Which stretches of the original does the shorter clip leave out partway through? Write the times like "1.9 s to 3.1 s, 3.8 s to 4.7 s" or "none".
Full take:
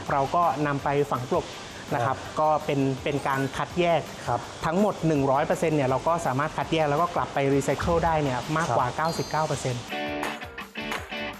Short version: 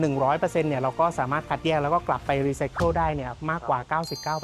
none